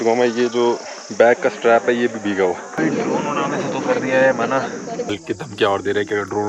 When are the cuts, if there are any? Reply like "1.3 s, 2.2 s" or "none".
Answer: 2.8 s, 5.1 s